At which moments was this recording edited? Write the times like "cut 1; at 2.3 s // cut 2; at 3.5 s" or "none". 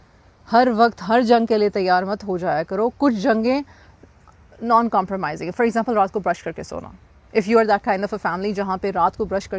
none